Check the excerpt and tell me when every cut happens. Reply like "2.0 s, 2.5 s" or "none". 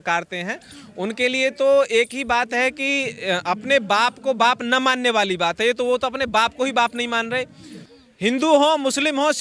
7.8 s